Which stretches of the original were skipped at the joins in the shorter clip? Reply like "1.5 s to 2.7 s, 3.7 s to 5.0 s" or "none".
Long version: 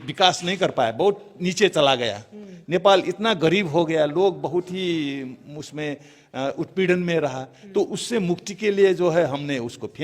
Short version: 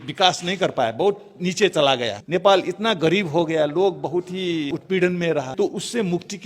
2.1 s to 2.6 s, 5.1 s to 6.6 s, 7.4 s to 7.7 s